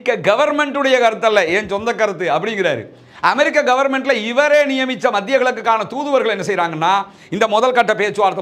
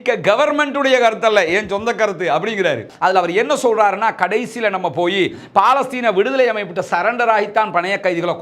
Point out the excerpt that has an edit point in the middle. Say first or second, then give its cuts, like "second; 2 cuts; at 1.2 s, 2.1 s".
second; 1 cut; at 2.9 s